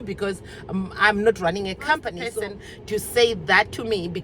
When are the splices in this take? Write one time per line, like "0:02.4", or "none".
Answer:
0:02.2